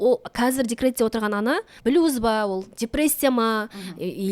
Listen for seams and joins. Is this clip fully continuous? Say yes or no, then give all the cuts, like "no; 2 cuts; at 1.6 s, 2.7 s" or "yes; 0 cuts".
no; 1 cut; at 1.7 s